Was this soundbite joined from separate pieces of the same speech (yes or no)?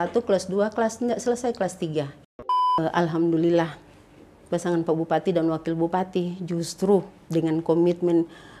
yes